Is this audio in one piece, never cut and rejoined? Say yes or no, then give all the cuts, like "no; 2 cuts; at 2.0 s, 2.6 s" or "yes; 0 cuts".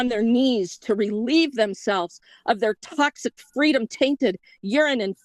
yes; 0 cuts